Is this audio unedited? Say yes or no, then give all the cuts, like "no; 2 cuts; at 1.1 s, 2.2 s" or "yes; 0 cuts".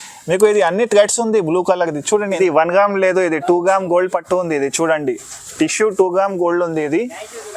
no; 1 cut; at 2.4 s